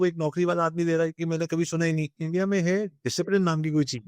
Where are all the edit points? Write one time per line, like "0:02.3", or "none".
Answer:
0:02.2